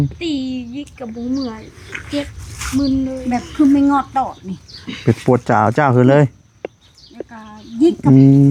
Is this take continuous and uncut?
yes; 0 cuts

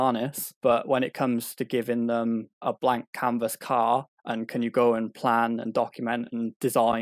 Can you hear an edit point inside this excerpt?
no; 0 cuts

